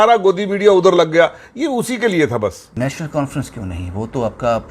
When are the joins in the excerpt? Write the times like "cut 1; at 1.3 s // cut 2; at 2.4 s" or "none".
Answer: cut 1; at 2.6 s